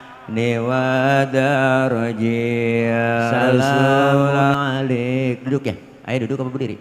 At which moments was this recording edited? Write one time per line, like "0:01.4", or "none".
0:04.5

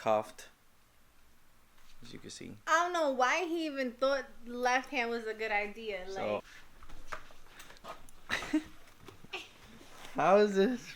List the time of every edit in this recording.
0:06.5

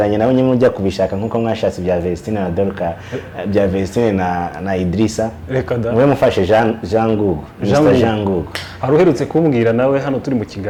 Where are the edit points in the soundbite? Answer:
none

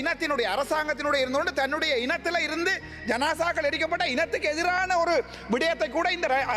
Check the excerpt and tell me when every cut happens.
none

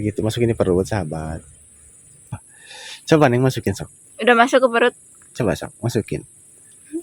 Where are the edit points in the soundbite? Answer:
0:02.4

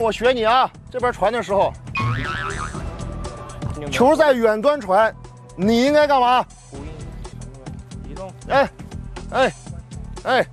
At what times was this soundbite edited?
none

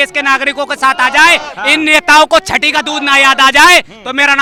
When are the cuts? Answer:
none

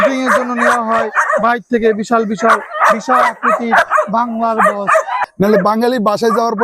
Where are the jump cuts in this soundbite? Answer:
0:05.2

